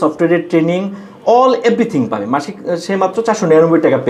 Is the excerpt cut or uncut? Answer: uncut